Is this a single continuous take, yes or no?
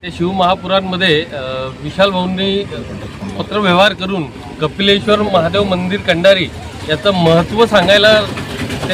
yes